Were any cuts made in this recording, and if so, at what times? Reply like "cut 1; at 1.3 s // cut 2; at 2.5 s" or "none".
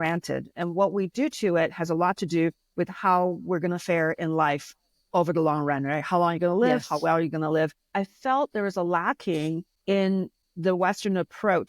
cut 1; at 7.9 s // cut 2; at 9.7 s // cut 3; at 10.4 s